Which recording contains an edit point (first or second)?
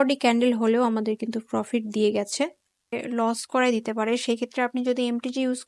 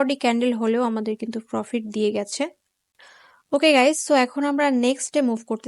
first